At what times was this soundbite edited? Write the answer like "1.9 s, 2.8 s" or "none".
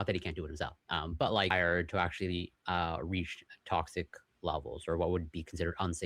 1.5 s